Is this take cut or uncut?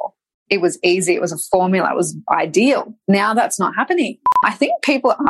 cut